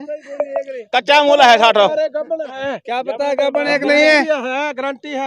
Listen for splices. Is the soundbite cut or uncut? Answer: uncut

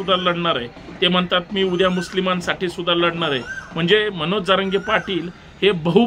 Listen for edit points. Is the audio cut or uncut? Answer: uncut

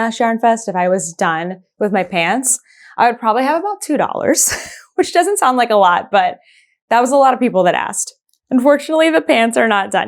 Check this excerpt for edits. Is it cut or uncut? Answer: uncut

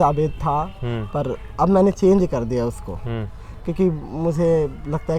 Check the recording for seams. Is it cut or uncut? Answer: uncut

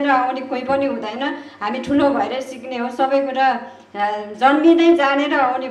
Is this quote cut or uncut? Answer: uncut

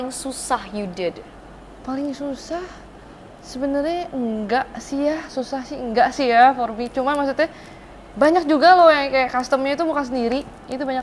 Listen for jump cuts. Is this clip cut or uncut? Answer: uncut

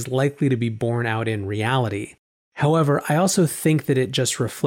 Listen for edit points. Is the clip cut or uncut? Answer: uncut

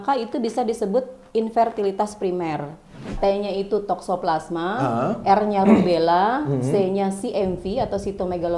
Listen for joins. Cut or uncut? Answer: cut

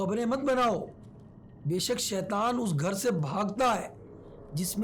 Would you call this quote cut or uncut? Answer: uncut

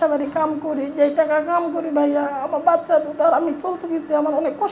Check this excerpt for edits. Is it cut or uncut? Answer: uncut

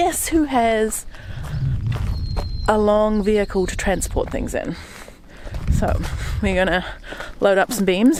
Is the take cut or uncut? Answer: uncut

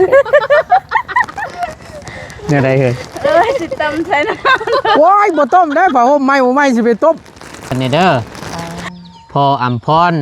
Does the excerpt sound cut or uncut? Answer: cut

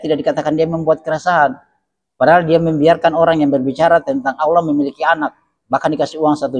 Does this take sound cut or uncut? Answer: uncut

